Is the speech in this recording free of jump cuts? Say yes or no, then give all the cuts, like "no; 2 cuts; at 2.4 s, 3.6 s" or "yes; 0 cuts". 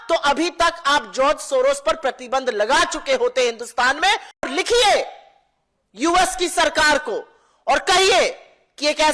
no; 1 cut; at 4.4 s